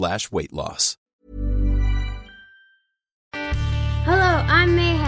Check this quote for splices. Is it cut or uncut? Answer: cut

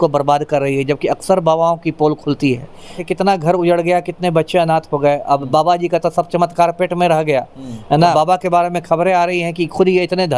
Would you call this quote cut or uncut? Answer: cut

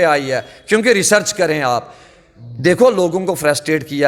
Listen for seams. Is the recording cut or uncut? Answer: uncut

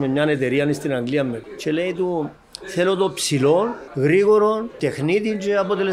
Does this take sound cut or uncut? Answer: cut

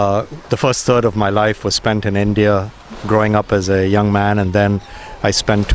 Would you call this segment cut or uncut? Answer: cut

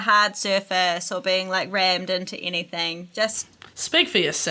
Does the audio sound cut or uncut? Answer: uncut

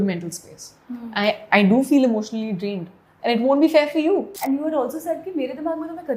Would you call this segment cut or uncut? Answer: cut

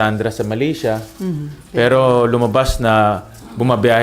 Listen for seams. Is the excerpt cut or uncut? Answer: uncut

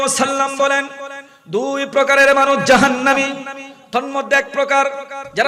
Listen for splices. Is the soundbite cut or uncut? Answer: uncut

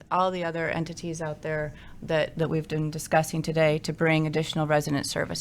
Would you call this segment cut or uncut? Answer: uncut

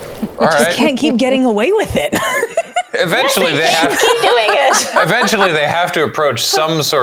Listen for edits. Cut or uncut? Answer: uncut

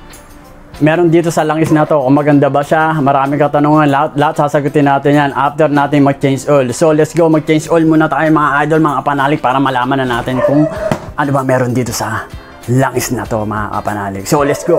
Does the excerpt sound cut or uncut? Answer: uncut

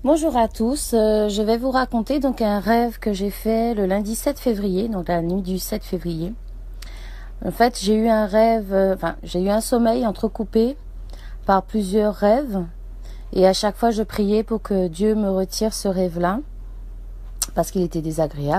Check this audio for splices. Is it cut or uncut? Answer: uncut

